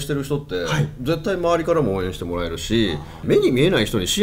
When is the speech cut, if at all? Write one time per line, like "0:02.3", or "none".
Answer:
0:03.1